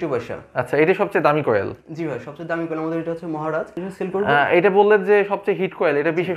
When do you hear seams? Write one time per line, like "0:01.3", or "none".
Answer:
0:03.8